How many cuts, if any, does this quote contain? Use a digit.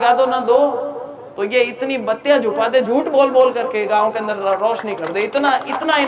0